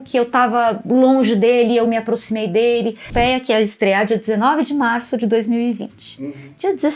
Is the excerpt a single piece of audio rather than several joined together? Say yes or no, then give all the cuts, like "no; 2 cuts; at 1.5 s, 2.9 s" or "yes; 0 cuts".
no; 1 cut; at 3.1 s